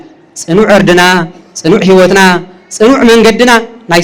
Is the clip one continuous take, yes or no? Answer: yes